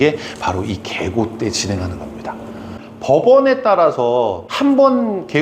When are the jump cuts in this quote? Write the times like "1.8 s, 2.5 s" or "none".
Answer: 4.4 s

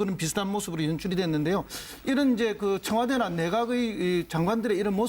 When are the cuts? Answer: 2.5 s

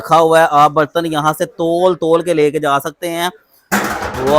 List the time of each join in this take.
none

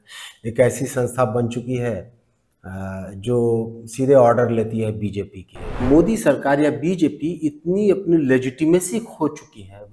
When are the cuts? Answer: 5.8 s

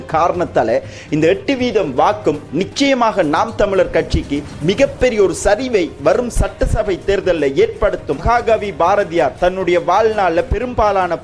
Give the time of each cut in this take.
8.2 s

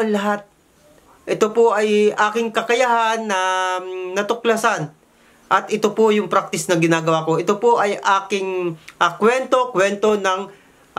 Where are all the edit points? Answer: 1.1 s

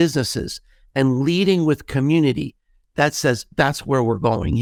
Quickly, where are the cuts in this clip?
none

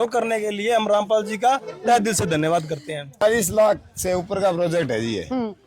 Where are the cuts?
3.2 s

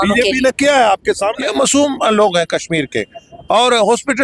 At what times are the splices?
1.4 s

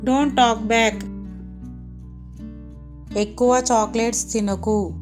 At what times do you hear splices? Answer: 1.5 s, 3.1 s

